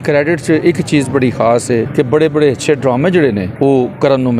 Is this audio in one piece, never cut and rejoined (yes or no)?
no